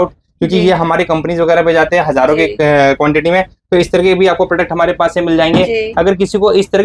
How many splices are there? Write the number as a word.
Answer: zero